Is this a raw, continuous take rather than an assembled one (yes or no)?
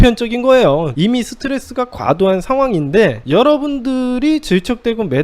no